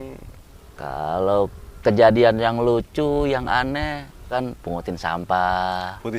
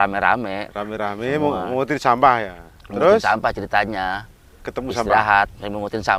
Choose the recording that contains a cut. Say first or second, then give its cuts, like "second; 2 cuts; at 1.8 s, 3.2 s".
first; 1 cut; at 4.3 s